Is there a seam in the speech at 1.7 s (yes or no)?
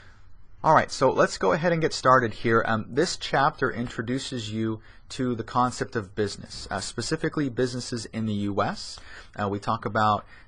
no